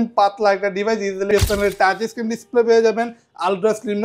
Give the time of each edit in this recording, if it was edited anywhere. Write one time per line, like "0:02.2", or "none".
0:01.3